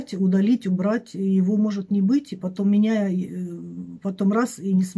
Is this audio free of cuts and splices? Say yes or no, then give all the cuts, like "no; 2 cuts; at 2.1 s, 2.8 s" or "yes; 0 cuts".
yes; 0 cuts